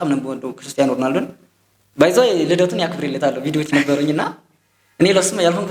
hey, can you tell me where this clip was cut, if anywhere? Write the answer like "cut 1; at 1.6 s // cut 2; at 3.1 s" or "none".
none